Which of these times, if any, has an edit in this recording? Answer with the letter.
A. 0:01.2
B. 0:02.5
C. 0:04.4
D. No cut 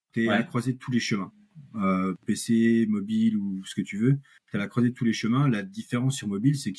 D